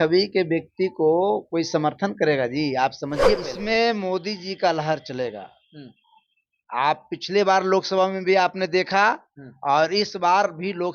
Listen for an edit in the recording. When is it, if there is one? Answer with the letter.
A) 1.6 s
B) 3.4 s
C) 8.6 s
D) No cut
B